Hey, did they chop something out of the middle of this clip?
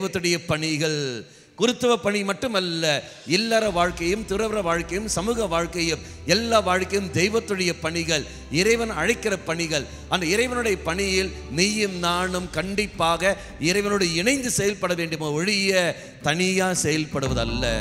no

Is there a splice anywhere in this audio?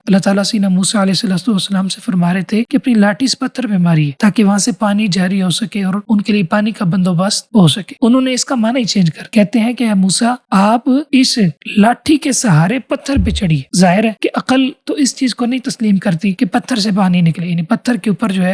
no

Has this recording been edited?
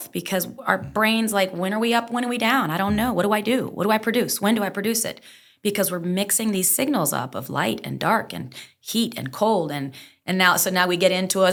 no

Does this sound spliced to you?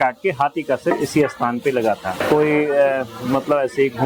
yes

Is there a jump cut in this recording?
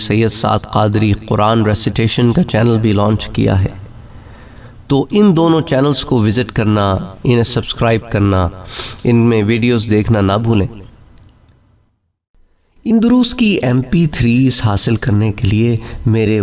yes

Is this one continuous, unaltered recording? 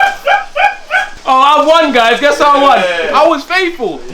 no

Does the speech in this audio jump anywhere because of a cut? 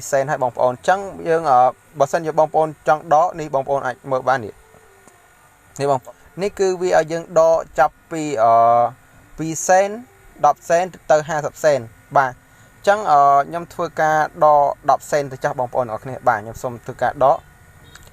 yes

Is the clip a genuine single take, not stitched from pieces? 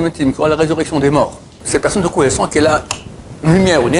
no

